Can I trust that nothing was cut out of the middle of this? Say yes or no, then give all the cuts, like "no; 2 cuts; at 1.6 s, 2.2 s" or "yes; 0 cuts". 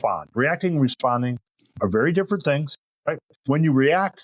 no; 1 cut; at 3.1 s